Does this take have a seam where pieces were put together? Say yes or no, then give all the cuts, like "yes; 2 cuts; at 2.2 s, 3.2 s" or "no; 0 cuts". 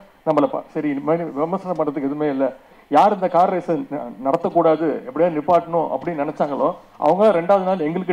yes; 1 cut; at 2.7 s